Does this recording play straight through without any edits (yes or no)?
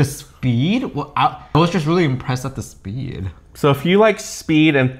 no